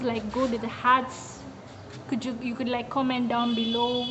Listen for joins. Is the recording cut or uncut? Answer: uncut